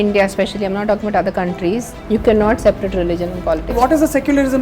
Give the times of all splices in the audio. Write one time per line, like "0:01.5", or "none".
0:01.9
0:03.7

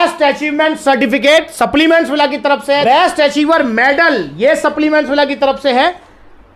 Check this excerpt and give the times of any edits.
0:02.8

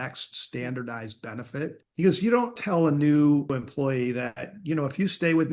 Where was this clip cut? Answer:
0:01.8
0:02.6
0:03.5

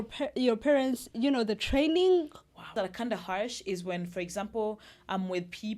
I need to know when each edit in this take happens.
0:02.7

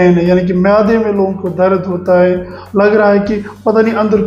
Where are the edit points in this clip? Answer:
none

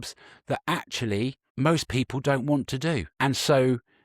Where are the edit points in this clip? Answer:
0:01.4
0:03.1

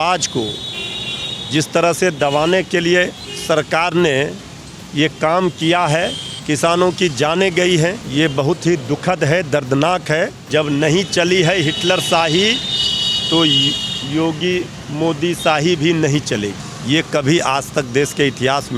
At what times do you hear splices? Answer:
0:03.3
0:06.3
0:08.0
0:10.4
0:16.6

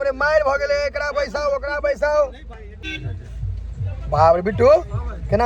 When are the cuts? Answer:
0:02.9

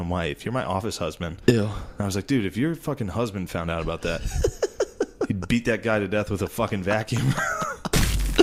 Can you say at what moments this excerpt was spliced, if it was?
none

